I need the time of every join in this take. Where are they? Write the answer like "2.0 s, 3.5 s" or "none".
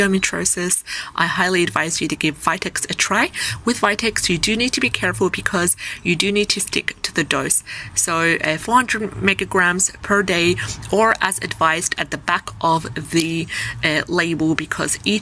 none